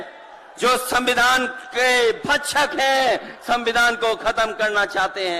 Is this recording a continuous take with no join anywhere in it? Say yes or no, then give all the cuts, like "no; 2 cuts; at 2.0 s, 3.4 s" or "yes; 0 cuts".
yes; 0 cuts